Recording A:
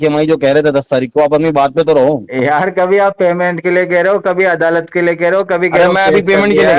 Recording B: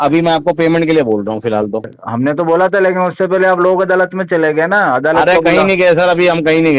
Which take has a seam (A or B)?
B